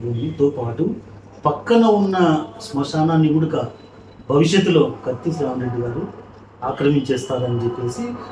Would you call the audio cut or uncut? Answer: uncut